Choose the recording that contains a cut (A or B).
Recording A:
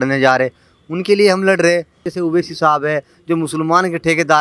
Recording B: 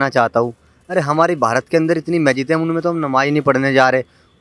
A